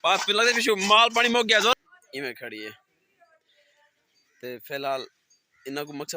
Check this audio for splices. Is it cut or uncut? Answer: cut